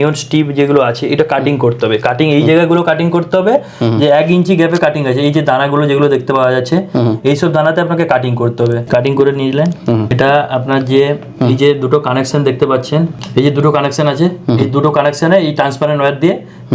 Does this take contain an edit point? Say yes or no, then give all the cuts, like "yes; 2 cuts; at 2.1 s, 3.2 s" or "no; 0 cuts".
yes; 3 cuts; at 8.8 s, 10.1 s, 13.1 s